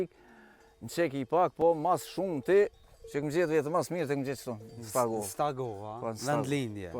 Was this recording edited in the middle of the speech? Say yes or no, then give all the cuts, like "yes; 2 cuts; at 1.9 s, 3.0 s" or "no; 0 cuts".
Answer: no; 0 cuts